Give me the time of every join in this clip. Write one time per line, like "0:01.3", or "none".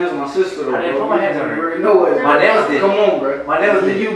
none